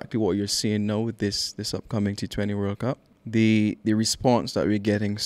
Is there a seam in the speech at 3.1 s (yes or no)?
yes